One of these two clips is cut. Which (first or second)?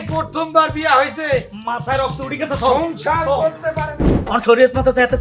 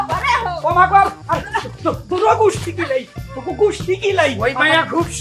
first